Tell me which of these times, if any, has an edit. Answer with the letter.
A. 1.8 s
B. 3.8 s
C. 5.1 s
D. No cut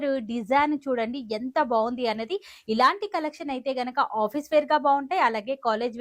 D